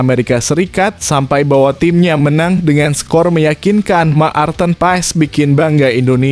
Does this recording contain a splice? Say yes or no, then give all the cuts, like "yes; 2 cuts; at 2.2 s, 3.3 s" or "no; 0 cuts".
no; 0 cuts